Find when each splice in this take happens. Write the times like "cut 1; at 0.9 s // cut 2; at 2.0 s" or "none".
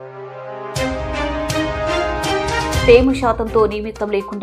cut 1; at 2.8 s